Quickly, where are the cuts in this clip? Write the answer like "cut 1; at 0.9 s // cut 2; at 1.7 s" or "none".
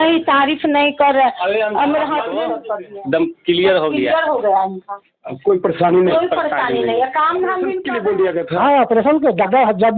cut 1; at 2.4 s // cut 2; at 7.9 s

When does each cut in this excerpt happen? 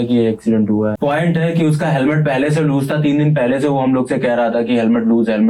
cut 1; at 1.0 s

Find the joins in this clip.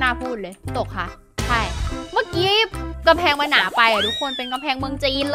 none

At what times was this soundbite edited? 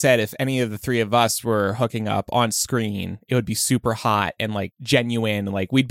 none

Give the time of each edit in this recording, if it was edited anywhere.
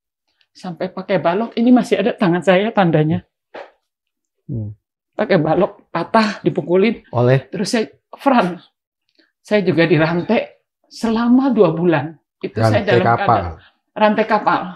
none

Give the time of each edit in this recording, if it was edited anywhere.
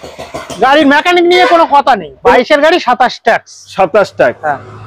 cut 1; at 2.3 s

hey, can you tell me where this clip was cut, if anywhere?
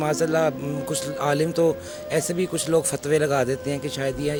none

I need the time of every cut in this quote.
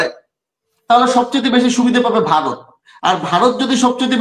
none

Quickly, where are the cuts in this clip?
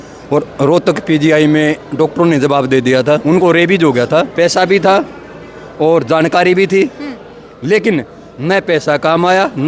cut 1; at 3.2 s // cut 2; at 4.3 s

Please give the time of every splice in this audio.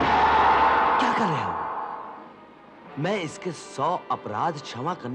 none

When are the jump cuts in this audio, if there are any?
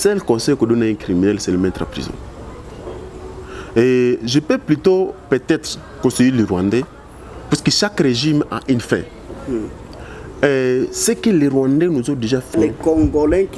none

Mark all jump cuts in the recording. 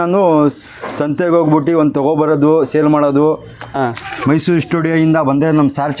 cut 1; at 3.7 s

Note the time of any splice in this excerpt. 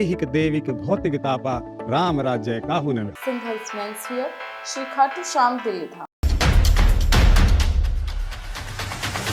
none

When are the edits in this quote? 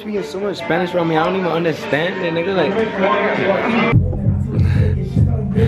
none

